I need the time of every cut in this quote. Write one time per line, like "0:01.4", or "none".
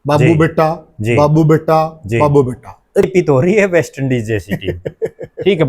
0:03.1